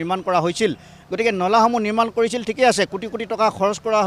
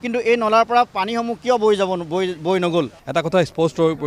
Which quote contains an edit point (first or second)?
second